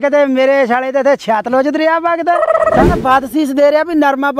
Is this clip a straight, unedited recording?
no; 1 cut; at 2.9 s

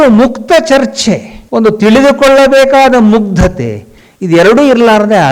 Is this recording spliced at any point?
yes; 1 cut; at 1.3 s

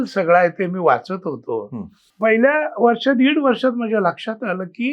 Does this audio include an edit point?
yes; 1 cut; at 2.0 s

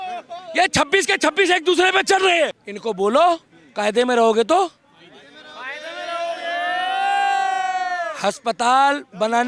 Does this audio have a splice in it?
yes; 1 cut; at 2.7 s

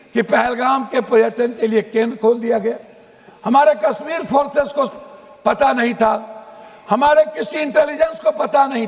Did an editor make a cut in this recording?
no; 0 cuts

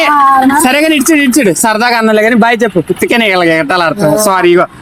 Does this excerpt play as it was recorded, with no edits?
yes; 0 cuts

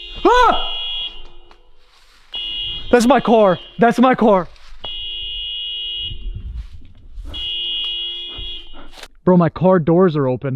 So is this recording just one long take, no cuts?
no; 1 cut; at 9.1 s

